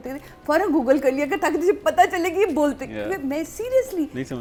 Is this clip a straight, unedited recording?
yes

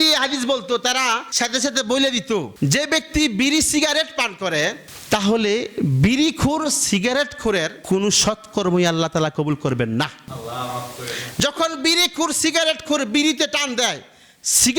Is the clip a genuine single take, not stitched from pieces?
no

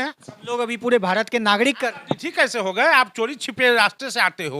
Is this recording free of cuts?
yes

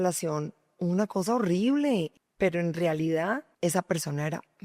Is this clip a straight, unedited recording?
no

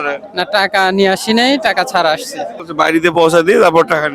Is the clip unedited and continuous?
no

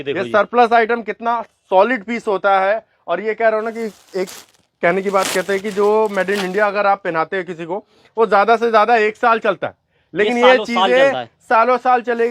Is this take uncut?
yes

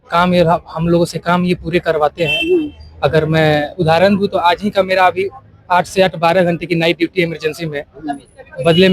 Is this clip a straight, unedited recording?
yes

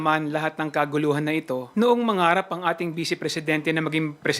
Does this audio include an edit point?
yes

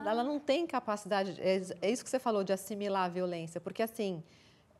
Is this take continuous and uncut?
yes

